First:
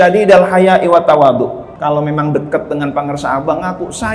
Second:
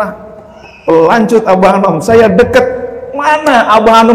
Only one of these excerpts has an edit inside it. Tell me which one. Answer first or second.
first